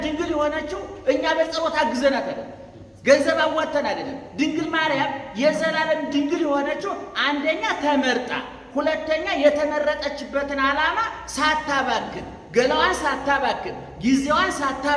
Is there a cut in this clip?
no; 0 cuts

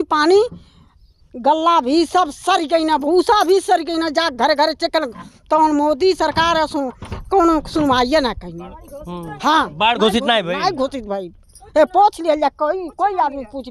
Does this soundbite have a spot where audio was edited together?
no; 0 cuts

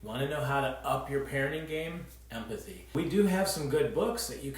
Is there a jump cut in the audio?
yes; 1 cut; at 2.9 s

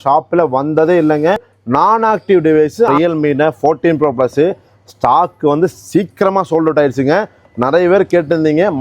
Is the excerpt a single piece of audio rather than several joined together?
no; 2 cuts; at 1.5 s, 2.9 s

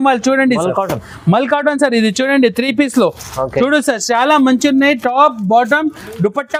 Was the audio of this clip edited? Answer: no; 0 cuts

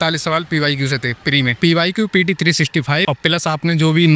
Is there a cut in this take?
yes; 2 cuts; at 1.6 s, 3.0 s

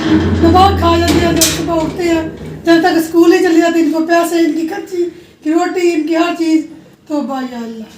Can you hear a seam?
no; 0 cuts

